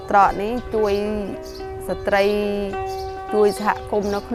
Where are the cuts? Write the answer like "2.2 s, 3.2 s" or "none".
none